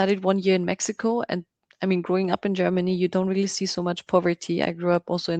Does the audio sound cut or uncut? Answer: uncut